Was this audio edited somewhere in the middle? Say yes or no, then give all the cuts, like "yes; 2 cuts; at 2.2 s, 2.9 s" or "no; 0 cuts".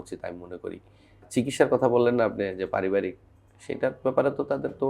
yes; 1 cut; at 1.2 s